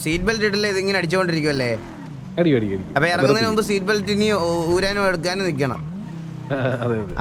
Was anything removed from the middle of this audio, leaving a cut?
no; 0 cuts

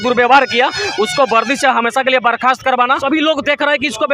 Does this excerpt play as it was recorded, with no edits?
no; 1 cut; at 3.0 s

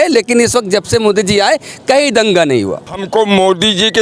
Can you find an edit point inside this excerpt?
yes; 1 cut; at 3.0 s

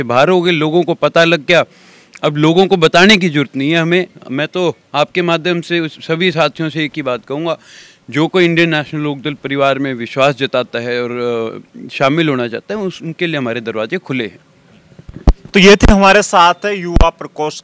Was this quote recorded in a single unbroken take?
yes; 0 cuts

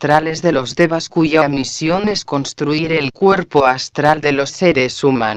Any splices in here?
yes; 1 cut; at 1.0 s

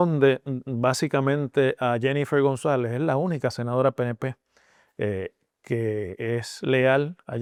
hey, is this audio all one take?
yes; 0 cuts

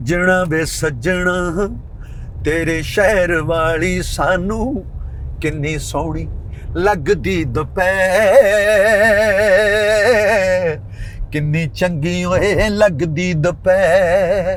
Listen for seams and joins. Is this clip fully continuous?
yes; 0 cuts

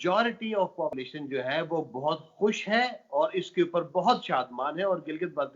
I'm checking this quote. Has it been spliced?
yes; 1 cut; at 1.0 s

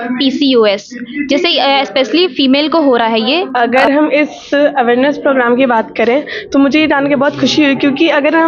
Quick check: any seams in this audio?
yes; 1 cut; at 3.5 s

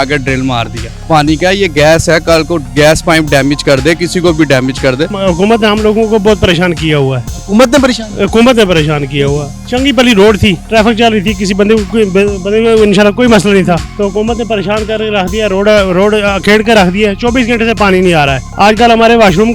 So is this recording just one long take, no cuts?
no; 5 cuts; at 0.9 s, 5.2 s, 10.6 s, 13.9 s, 18.4 s

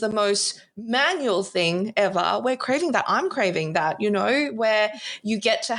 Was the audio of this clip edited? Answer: no; 0 cuts

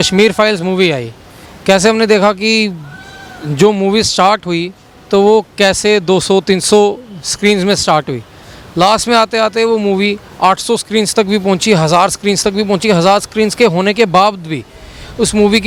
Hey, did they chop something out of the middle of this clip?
no; 0 cuts

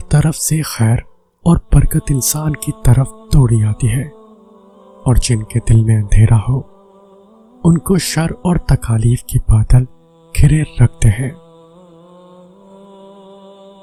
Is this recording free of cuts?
yes; 0 cuts

